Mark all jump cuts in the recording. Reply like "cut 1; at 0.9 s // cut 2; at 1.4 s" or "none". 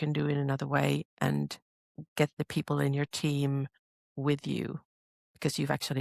none